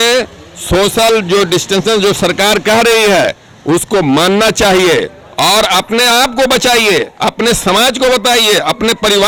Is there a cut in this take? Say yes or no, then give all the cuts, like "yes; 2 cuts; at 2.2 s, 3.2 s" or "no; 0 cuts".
no; 0 cuts